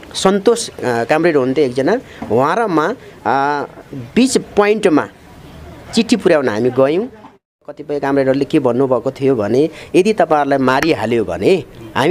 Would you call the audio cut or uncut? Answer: cut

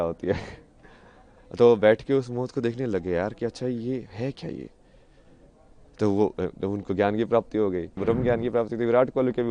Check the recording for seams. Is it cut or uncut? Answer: cut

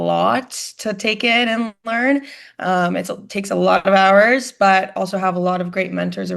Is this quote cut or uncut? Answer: uncut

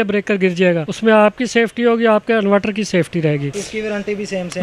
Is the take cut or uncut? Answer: uncut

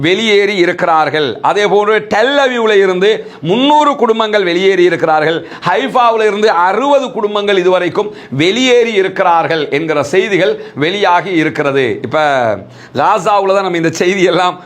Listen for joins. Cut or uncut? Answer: cut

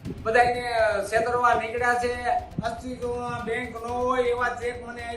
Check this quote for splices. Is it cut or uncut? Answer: cut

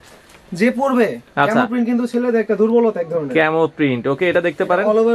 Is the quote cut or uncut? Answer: uncut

